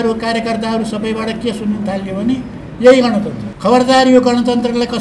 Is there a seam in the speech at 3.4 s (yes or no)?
yes